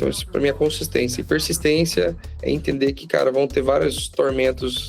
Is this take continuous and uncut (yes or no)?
no